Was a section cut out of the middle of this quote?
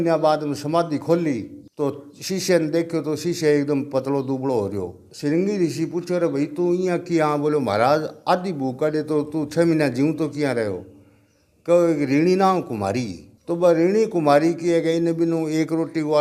no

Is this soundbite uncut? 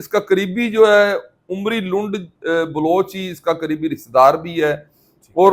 yes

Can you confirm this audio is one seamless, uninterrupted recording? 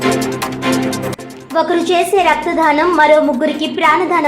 no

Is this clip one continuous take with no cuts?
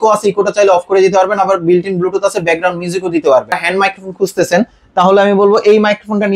no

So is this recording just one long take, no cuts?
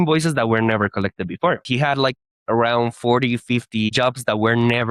no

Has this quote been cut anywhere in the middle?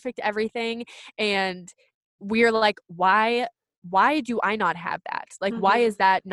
no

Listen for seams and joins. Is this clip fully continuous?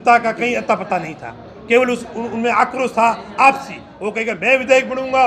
yes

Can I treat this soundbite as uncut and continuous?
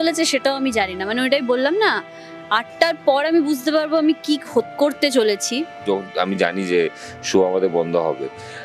no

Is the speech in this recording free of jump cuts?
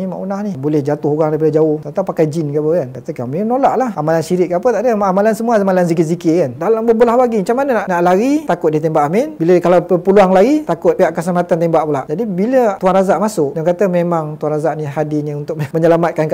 no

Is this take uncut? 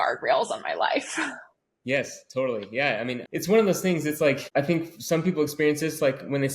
no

